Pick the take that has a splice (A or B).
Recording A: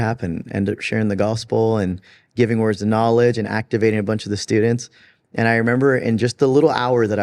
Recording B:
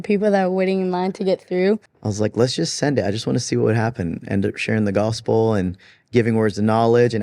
B